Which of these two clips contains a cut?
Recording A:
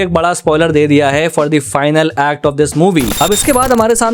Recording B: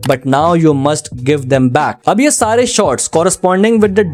A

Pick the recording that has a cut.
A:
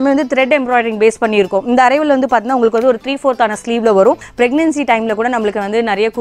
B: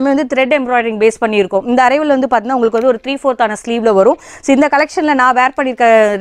A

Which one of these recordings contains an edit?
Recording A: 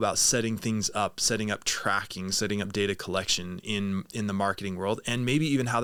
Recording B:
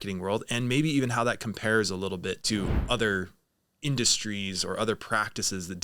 B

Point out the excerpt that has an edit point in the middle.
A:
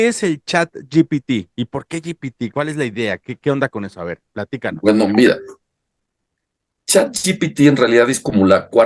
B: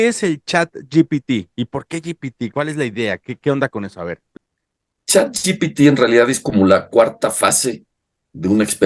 B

